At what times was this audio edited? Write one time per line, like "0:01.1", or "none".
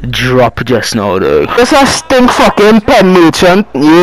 0:01.6